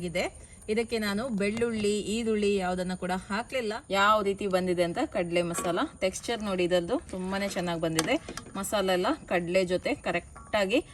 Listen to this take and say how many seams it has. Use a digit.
1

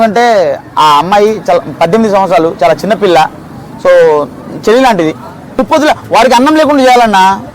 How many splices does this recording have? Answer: 1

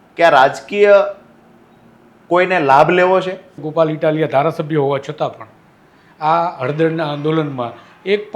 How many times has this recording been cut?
1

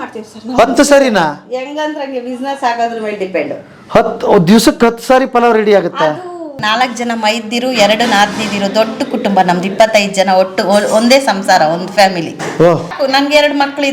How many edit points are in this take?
2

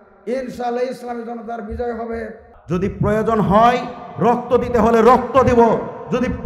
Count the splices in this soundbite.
1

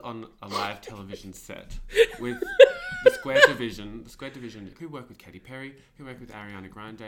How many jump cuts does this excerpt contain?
1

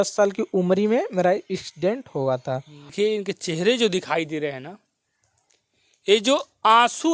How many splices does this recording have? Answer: 1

